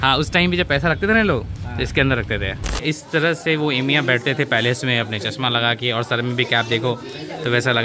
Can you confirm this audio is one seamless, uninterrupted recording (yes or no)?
no